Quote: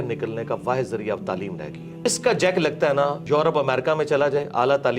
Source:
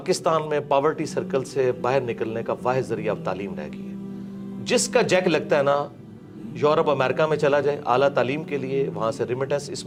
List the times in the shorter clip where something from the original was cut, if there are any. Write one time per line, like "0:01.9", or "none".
0:02.1
0:03.2